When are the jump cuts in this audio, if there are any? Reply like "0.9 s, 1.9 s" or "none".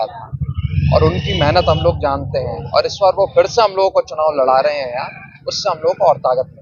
none